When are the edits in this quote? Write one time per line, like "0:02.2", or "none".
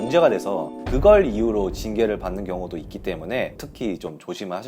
0:03.6